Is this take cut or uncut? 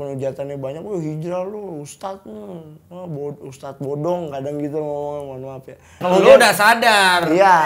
cut